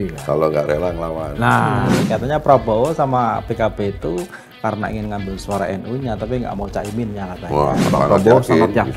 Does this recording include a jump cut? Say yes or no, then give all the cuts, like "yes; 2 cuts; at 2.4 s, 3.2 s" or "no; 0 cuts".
yes; 2 cuts; at 2.0 s, 7.9 s